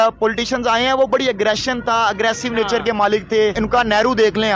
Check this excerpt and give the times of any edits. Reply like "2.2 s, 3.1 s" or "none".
3.6 s